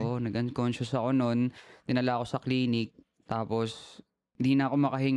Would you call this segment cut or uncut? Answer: cut